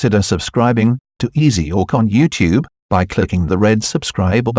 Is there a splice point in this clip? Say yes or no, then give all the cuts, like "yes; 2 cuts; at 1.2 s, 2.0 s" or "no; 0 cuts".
yes; 1 cut; at 1.5 s